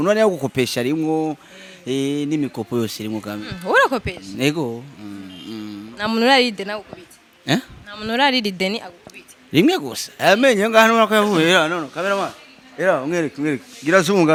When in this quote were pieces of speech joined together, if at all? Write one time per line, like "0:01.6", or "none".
none